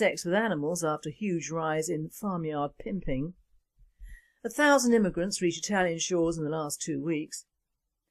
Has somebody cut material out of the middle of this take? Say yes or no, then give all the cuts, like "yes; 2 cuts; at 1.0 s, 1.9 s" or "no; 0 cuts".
no; 0 cuts